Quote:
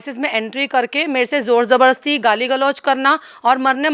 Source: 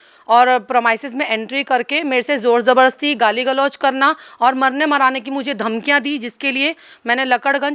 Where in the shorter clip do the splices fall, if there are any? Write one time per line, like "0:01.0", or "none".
none